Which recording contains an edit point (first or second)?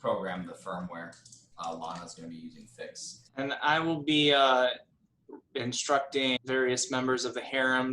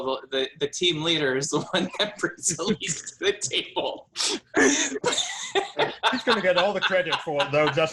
first